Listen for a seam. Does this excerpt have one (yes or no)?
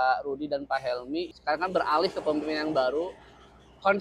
yes